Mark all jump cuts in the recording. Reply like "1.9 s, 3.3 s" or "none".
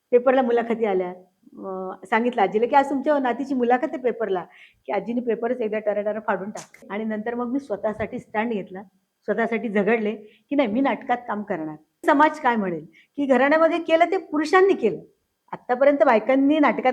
6.8 s, 12.0 s